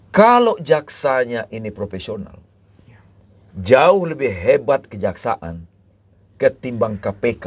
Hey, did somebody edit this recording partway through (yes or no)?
no